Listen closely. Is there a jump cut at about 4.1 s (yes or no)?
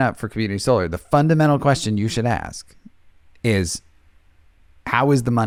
no